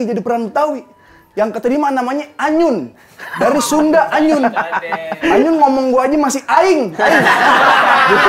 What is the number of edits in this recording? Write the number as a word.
zero